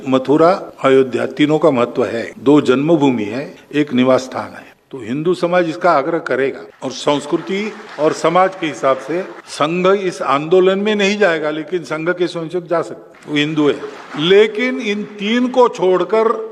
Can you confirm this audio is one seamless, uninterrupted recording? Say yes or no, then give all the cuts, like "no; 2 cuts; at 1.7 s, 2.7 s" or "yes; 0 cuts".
yes; 0 cuts